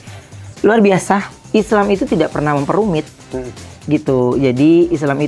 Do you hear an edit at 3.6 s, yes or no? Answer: no